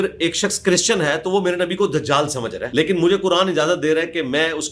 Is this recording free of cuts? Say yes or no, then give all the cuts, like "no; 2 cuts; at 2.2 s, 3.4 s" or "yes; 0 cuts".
no; 1 cut; at 2.6 s